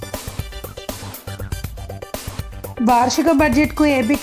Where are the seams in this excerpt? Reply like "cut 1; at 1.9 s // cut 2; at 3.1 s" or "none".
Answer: cut 1; at 1.0 s